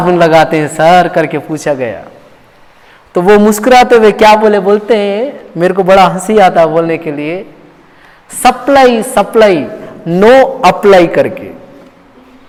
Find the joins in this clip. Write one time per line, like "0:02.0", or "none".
none